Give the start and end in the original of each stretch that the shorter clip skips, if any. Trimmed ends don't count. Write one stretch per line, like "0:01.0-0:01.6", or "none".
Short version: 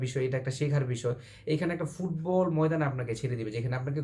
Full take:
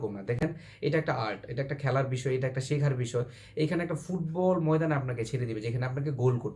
none